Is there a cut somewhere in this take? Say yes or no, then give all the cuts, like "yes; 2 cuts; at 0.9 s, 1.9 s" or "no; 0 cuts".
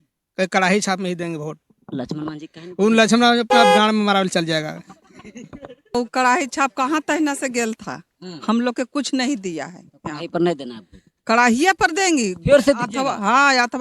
yes; 1 cut; at 5.9 s